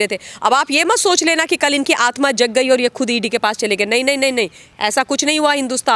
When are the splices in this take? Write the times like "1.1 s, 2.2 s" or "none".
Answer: none